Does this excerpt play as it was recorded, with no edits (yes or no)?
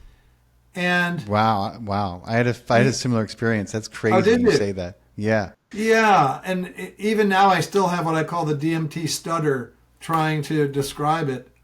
no